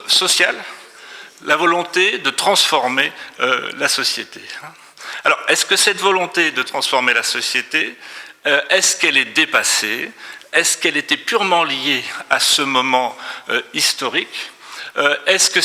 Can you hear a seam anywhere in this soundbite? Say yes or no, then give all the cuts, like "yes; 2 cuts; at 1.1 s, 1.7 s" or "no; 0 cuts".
no; 0 cuts